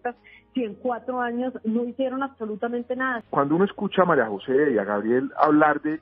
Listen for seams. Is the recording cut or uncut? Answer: cut